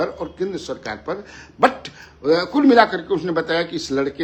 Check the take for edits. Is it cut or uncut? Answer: uncut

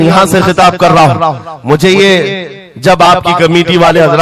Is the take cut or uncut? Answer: uncut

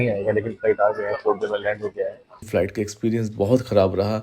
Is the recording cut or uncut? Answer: cut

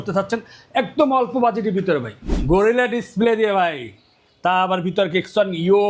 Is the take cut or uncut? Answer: cut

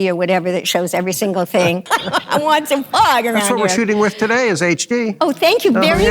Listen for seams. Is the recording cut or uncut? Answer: cut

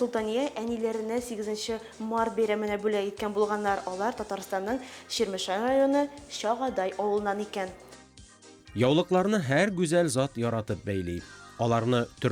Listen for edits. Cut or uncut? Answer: cut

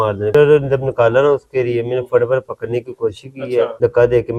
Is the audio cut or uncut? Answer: uncut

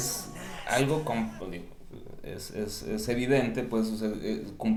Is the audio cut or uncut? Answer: uncut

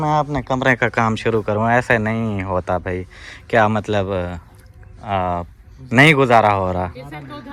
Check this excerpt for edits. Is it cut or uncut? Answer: uncut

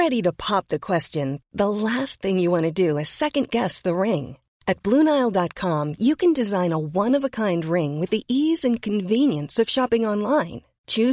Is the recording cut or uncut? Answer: uncut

